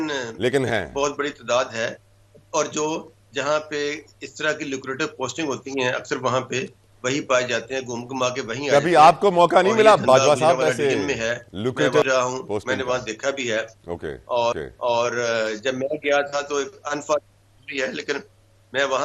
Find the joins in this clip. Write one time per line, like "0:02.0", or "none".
none